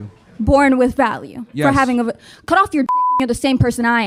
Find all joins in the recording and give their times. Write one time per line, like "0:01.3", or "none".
none